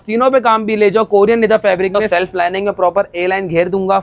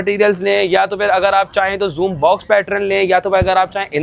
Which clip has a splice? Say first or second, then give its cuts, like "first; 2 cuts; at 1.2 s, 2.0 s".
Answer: first; 1 cut; at 2.0 s